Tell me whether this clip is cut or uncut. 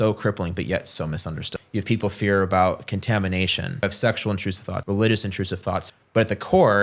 cut